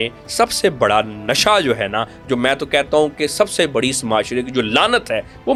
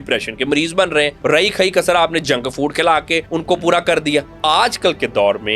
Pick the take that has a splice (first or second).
second